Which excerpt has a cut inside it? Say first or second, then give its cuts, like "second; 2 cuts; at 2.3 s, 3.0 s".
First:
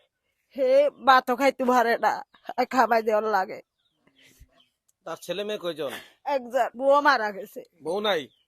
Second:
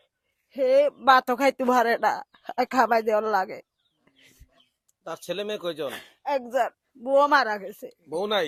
first; 1 cut; at 6.7 s